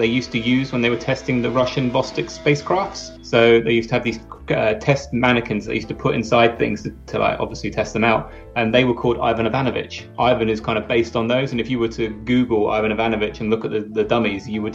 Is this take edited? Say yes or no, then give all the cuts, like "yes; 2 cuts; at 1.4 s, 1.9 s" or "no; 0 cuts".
yes; 1 cut; at 10.1 s